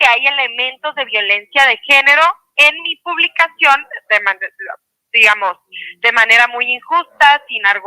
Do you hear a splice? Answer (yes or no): no